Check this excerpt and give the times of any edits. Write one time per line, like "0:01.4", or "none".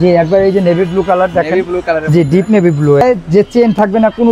0:03.0